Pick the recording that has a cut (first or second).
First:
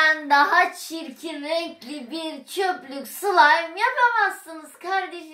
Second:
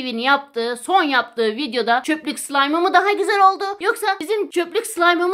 second